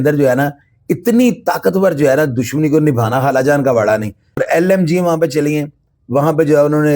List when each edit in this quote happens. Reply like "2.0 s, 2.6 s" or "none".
4.4 s